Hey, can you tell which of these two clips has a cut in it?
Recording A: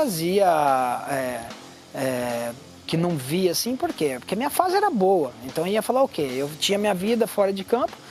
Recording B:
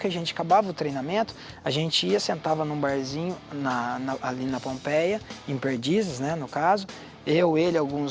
B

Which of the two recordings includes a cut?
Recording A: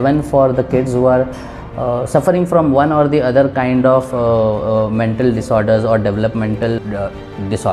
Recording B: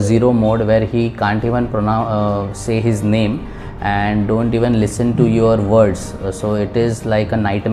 A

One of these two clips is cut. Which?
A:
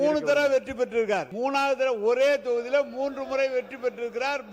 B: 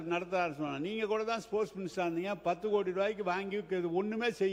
A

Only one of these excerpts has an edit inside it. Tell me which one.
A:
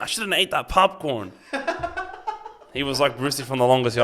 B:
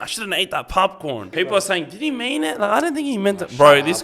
B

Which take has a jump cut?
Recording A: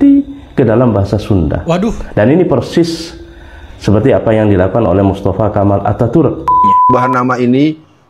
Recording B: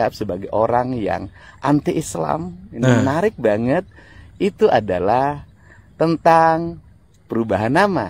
A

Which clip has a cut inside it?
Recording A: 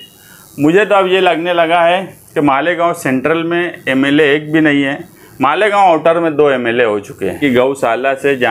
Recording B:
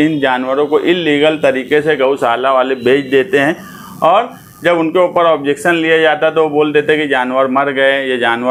A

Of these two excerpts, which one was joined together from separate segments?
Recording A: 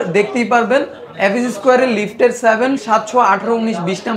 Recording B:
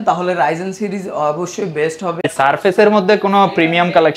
B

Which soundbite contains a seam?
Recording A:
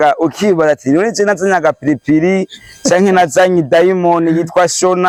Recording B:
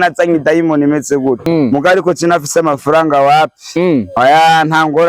B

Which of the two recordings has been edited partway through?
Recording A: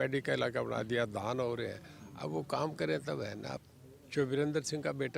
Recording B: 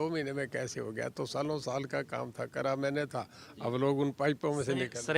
A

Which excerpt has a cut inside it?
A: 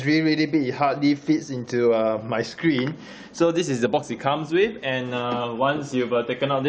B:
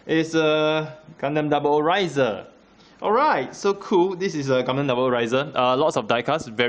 B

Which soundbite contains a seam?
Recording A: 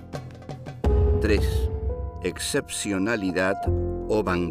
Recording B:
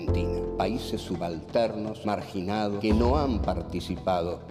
A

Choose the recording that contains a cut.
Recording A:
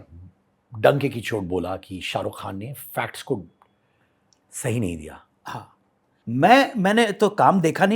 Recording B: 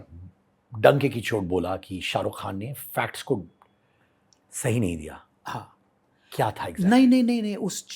A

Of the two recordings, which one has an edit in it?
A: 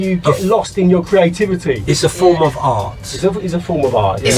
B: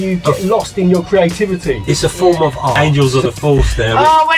B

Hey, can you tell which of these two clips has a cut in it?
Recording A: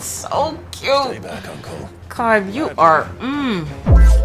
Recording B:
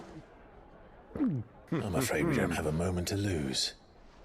B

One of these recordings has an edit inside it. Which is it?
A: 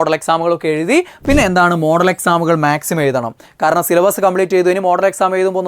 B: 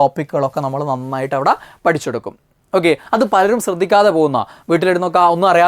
A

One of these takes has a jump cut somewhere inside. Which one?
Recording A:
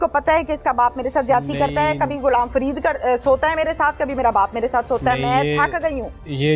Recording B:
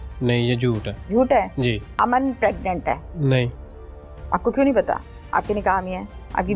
B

